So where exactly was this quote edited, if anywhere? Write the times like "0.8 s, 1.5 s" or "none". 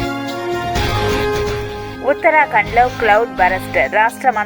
1.3 s